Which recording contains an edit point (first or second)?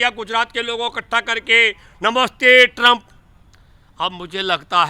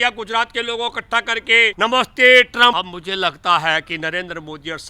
second